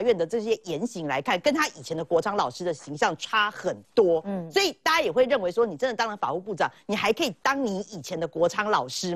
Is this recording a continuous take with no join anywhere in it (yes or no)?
yes